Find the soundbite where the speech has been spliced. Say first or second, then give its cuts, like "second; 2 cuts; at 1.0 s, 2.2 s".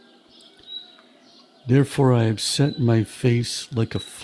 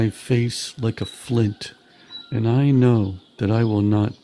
first; 1 cut; at 1.6 s